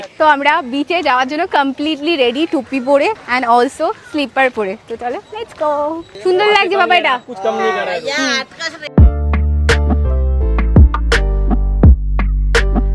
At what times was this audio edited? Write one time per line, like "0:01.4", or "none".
none